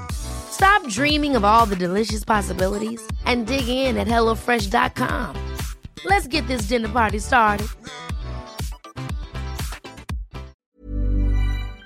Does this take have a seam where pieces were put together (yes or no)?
yes